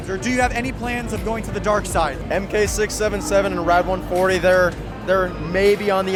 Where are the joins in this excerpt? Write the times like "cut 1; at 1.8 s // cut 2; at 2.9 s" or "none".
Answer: none